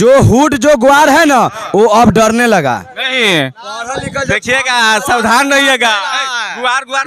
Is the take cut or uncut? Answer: uncut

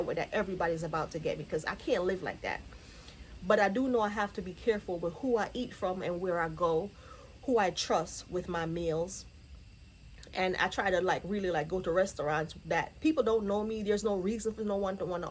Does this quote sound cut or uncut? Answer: uncut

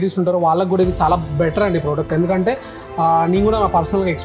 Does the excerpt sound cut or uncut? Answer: uncut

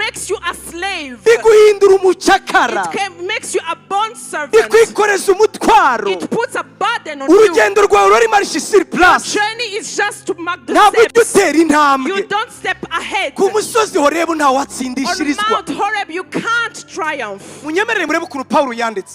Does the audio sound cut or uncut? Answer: uncut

